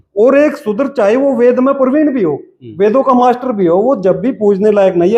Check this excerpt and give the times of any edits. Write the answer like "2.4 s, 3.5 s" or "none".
none